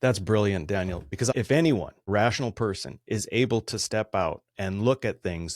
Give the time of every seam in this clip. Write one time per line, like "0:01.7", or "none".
0:01.2

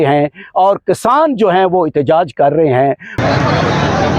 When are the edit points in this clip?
0:03.2

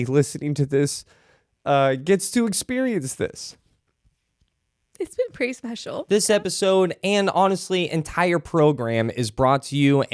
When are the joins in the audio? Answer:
0:06.0

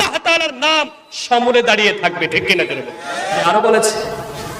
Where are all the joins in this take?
0:03.5

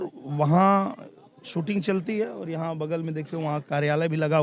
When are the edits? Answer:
none

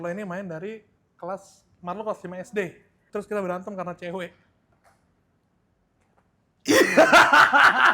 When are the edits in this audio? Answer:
0:03.0
0:04.7

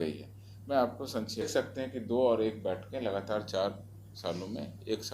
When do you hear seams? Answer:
0:01.5

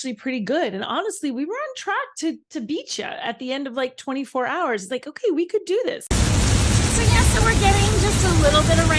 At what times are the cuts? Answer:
0:06.0

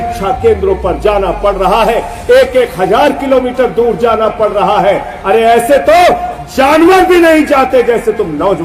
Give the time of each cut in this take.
none

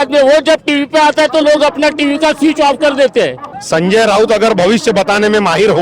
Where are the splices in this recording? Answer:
0:03.5

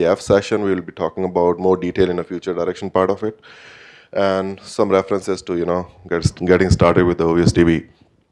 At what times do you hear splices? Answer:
none

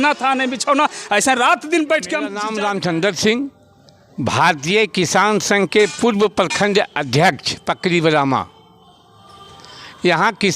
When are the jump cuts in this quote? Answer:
0:02.4

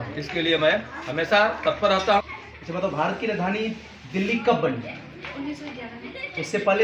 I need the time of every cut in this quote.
0:02.2

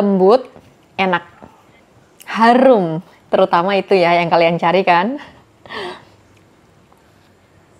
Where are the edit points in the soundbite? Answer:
none

